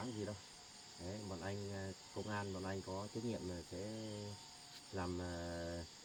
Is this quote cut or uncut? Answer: uncut